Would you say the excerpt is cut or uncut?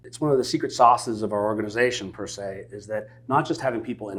uncut